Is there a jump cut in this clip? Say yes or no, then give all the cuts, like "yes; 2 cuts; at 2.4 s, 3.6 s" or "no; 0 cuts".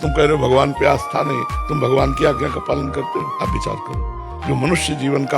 no; 0 cuts